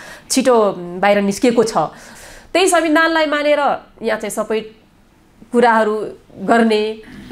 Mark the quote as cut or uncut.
cut